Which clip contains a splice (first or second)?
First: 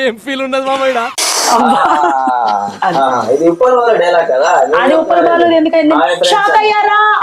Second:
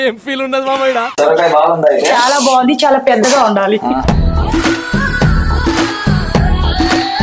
second